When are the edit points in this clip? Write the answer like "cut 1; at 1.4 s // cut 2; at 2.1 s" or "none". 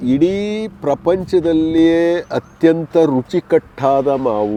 none